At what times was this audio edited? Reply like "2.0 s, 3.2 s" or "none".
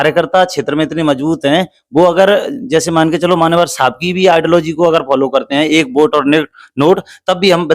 none